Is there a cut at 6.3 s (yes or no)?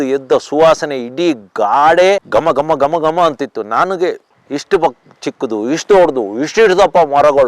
no